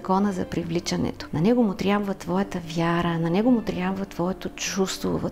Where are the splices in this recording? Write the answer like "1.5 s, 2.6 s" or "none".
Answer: 1.2 s